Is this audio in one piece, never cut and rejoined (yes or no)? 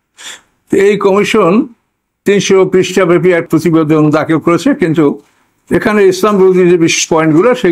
no